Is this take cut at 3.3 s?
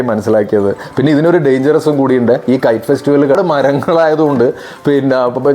yes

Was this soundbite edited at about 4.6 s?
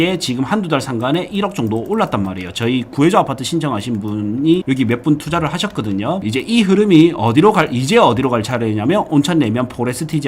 yes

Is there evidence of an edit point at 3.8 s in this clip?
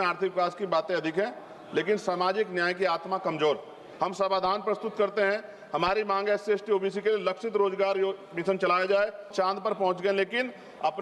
yes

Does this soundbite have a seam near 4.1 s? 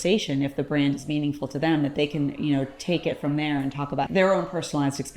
yes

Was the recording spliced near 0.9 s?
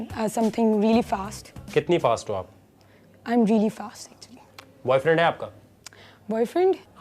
no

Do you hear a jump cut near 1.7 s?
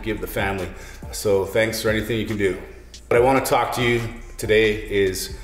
no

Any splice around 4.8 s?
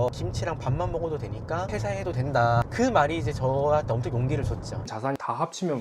yes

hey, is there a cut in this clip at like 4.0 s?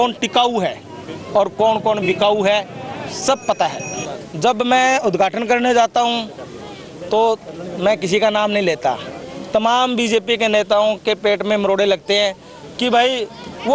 yes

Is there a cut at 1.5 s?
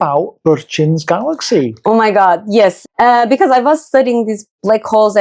no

